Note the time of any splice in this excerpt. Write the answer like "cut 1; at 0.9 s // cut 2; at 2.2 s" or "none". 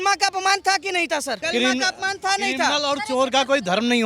cut 1; at 1.4 s